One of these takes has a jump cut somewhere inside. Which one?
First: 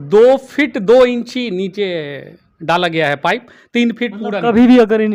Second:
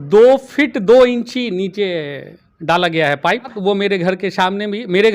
second; 1 cut; at 3.5 s

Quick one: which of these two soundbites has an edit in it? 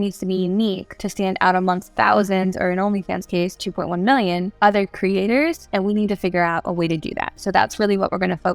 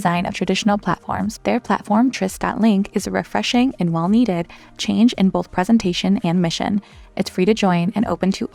first; 4 cuts; at 0.9 s, 1.9 s, 4.5 s, 5.6 s

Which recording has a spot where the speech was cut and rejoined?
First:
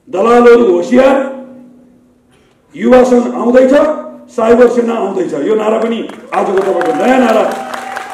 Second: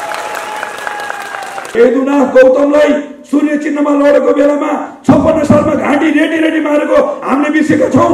second; 1 cut; at 1.8 s

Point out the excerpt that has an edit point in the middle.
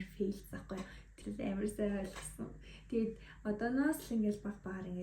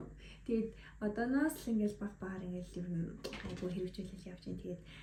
first; 1 cut; at 1.2 s

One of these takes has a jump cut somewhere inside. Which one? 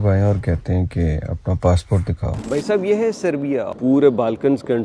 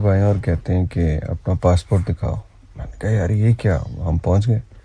first; 2 cuts; at 2.4 s, 3.8 s

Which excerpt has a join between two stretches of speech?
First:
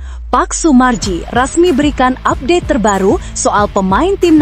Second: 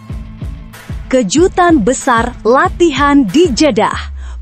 second; 1 cut; at 1.1 s

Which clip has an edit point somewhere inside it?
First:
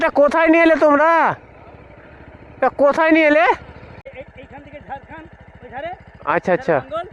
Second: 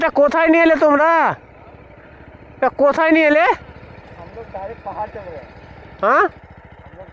first; 1 cut; at 4.1 s

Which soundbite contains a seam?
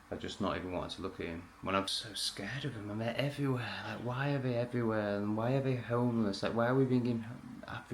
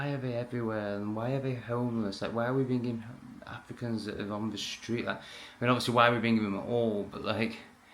first; 1 cut; at 1.9 s

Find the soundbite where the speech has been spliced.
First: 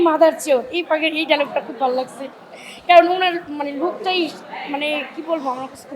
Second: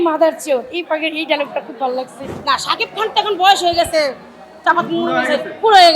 second; 1 cut; at 2.2 s

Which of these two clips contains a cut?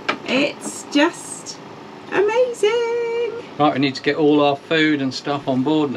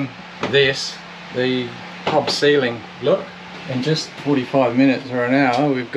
first; 1 cut; at 3.4 s

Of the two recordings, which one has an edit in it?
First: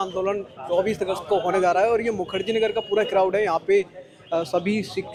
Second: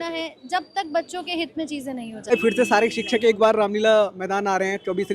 second; 1 cut; at 2.3 s

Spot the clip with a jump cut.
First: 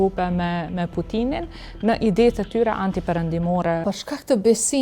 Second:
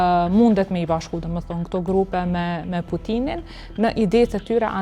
first; 1 cut; at 3.8 s

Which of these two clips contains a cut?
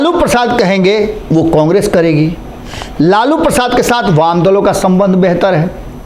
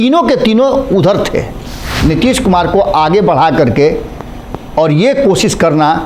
second; 1 cut; at 1.8 s

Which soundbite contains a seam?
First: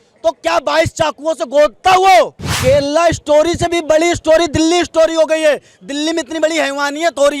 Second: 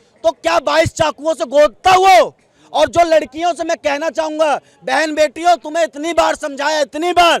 first; 1 cut; at 2.4 s

